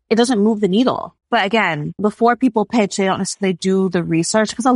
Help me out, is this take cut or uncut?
cut